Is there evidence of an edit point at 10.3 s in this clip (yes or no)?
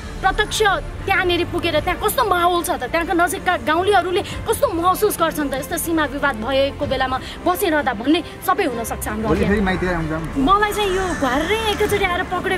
yes